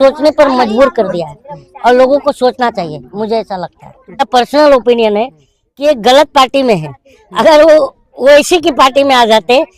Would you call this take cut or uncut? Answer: cut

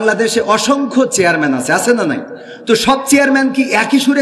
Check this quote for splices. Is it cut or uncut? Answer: uncut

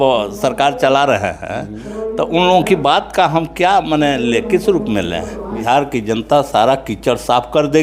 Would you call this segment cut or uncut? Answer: cut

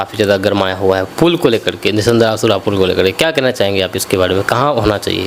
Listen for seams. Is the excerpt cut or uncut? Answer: uncut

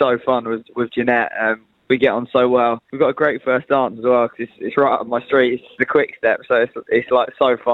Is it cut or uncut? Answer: cut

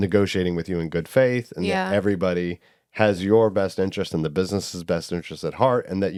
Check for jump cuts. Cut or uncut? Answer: uncut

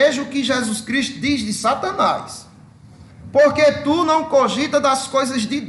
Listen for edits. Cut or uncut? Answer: uncut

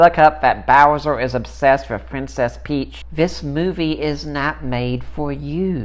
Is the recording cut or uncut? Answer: cut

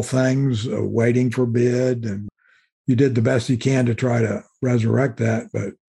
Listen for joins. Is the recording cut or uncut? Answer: uncut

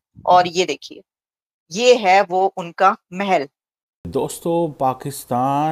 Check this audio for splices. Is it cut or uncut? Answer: cut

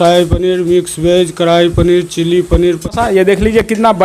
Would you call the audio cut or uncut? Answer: cut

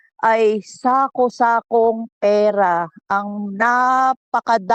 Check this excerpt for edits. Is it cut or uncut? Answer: uncut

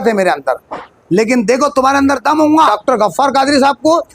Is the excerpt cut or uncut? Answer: cut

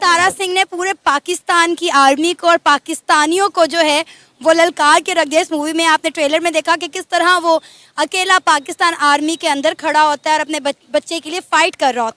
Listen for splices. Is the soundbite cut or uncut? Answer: uncut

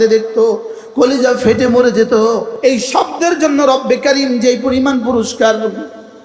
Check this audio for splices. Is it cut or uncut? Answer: cut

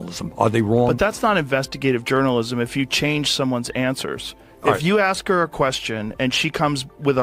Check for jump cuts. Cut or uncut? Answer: uncut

